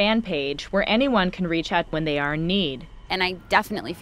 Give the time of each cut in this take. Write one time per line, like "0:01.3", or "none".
0:01.9
0:03.1